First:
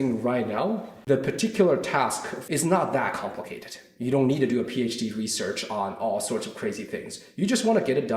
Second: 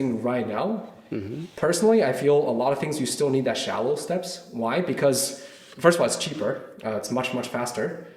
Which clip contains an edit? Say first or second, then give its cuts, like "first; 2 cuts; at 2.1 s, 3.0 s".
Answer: first; 2 cuts; at 0.9 s, 2.3 s